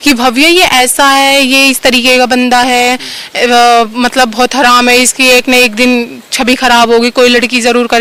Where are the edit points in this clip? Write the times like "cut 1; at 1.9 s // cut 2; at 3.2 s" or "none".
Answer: none